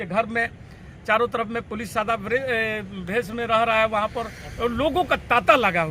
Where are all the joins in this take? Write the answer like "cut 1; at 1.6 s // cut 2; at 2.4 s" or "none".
none